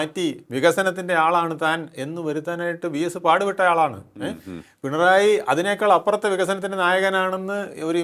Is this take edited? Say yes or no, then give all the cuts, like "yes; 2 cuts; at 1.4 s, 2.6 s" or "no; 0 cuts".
no; 0 cuts